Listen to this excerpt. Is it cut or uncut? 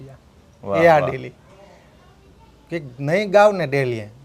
uncut